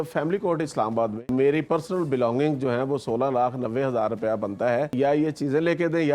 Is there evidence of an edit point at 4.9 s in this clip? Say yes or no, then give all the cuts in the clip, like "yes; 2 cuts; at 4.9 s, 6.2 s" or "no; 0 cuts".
yes; 2 cuts; at 1.3 s, 4.9 s